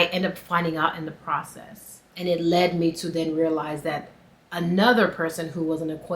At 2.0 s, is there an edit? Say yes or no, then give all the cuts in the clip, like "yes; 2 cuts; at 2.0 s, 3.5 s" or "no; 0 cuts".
yes; 1 cut; at 2.0 s